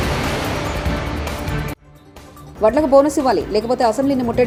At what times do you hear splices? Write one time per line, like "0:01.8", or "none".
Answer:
none